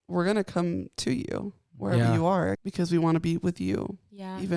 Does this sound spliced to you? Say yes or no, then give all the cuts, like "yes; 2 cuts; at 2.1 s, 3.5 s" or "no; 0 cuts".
no; 0 cuts